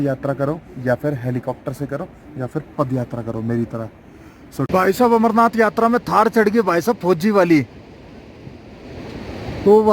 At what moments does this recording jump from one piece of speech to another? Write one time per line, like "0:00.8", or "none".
0:04.7